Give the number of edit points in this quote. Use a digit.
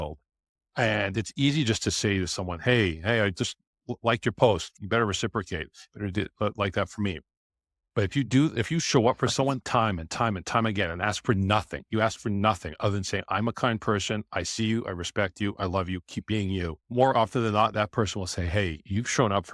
2